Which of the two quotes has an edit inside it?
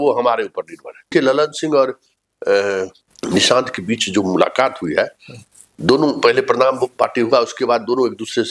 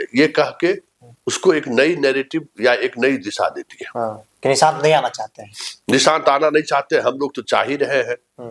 first; 2 cuts; at 1.0 s, 3.1 s

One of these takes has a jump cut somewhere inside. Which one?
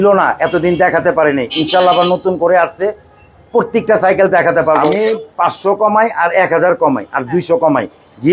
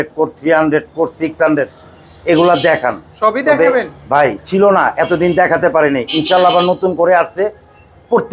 first; 1 cut; at 4.8 s

